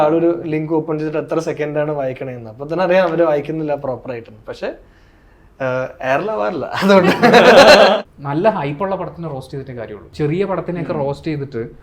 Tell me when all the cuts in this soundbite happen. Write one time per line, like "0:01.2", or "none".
0:08.0
0:10.1